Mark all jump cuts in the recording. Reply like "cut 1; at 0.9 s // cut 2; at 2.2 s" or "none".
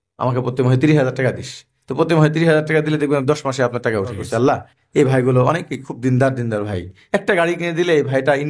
cut 1; at 4.3 s